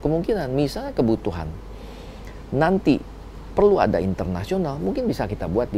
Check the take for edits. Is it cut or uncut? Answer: uncut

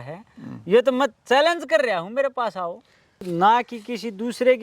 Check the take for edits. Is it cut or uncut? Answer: cut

